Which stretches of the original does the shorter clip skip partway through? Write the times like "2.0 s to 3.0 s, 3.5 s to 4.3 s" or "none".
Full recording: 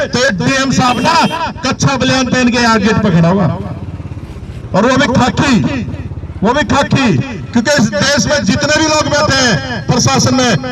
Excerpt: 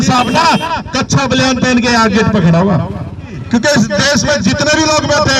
4.0 s to 7.3 s